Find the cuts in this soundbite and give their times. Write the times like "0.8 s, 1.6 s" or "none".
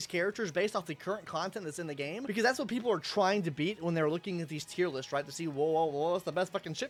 none